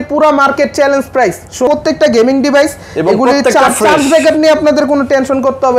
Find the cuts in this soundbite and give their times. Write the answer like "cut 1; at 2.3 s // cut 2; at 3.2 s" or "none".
cut 1; at 1.7 s